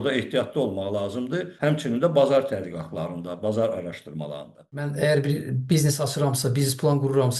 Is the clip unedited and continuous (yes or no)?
no